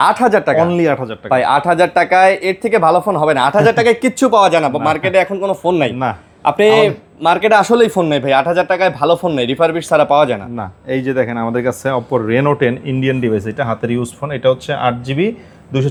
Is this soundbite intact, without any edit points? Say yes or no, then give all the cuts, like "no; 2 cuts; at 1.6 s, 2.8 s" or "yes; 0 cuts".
yes; 0 cuts